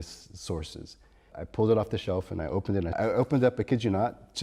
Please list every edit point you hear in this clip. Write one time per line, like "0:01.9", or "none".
0:01.4
0:03.0